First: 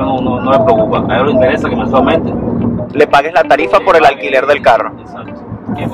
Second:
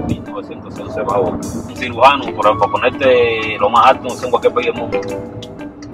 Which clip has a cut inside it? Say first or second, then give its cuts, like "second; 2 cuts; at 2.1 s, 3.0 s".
second; 1 cut; at 1.7 s